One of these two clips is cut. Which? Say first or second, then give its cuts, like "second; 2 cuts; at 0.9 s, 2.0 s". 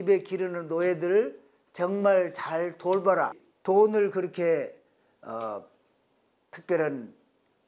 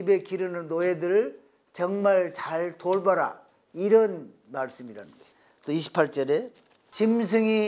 first; 1 cut; at 3.5 s